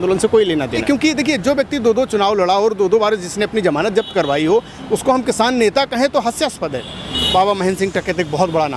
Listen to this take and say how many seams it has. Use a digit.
2